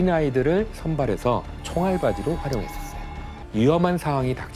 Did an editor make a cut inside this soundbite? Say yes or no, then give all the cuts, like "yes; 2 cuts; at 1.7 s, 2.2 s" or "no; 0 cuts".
yes; 1 cut; at 3.3 s